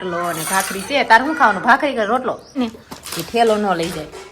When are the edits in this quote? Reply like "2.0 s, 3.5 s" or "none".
2.6 s

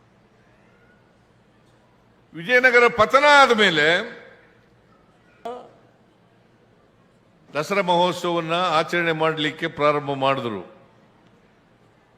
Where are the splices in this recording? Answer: 5.5 s

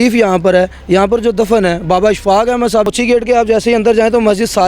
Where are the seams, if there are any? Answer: 2.9 s

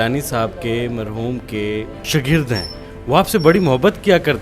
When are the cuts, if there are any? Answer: 2.0 s

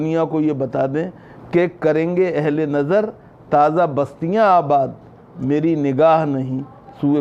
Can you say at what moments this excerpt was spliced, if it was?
none

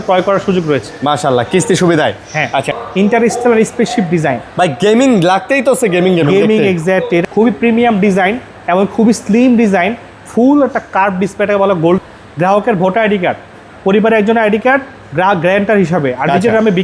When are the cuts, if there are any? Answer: 2.8 s, 7.2 s, 12.0 s

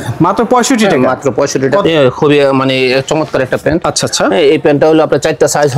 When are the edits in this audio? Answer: 1.8 s

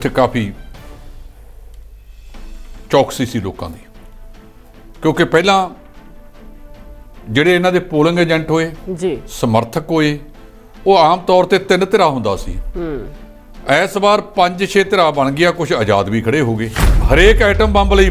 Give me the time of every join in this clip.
16.8 s

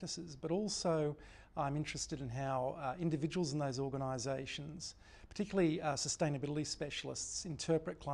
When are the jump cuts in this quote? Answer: 1.2 s

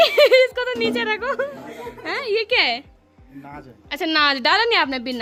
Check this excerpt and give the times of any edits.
none

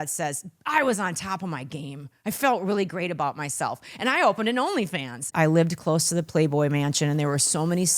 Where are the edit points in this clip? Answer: 5.3 s

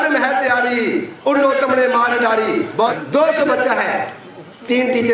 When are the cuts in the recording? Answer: 2.9 s

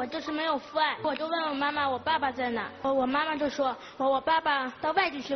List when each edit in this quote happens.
1.0 s, 2.8 s

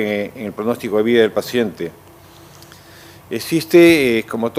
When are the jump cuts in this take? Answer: 2.2 s

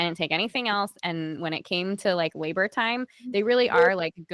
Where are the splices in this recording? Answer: none

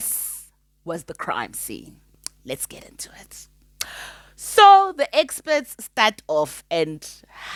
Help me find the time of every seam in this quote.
none

